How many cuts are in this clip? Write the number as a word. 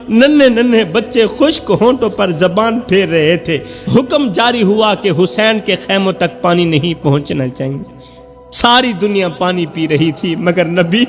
one